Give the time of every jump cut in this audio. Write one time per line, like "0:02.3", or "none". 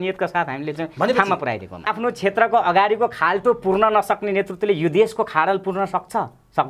0:01.8